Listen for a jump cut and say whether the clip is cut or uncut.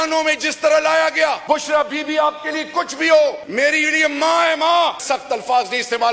cut